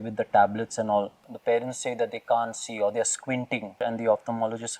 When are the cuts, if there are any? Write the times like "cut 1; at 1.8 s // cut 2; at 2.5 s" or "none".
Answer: cut 1; at 1.2 s // cut 2; at 3.7 s